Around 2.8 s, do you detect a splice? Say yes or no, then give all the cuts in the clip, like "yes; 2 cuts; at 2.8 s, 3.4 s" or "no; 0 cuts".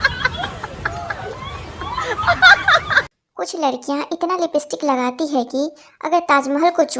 yes; 1 cut; at 2.8 s